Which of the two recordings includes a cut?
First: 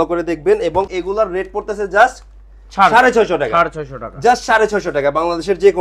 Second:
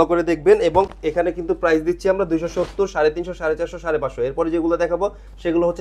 first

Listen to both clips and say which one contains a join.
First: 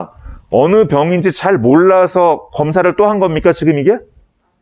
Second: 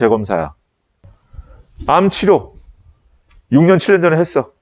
second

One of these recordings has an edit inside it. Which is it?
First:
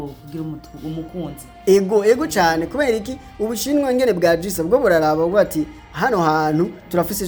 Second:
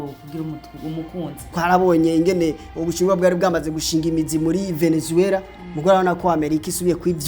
second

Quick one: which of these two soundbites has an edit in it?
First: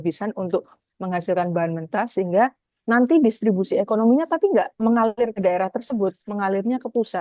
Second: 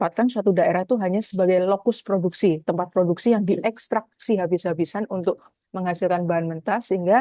first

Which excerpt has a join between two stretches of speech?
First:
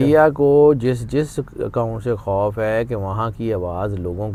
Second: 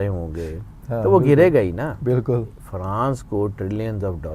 second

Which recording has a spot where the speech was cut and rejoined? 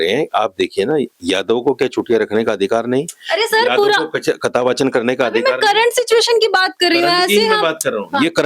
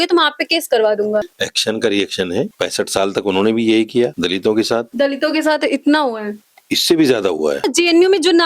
second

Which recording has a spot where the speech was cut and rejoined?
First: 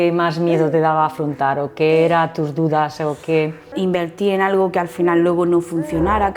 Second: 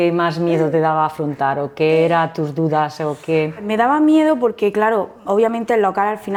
first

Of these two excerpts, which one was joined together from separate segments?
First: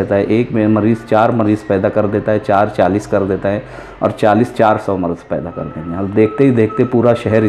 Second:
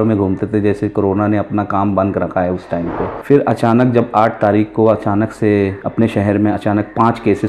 second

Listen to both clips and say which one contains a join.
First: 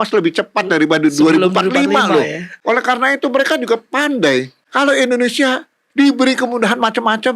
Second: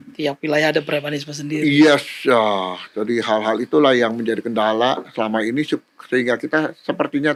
first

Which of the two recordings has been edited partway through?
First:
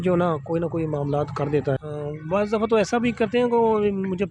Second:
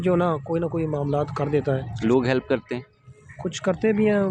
first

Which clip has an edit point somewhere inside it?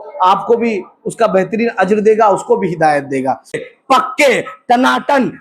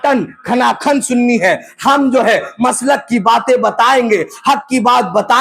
first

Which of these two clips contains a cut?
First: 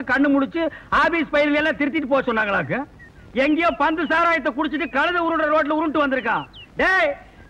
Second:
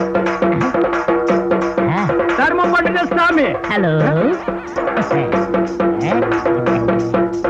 second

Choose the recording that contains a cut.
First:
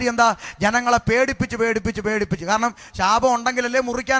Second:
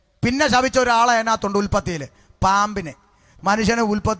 second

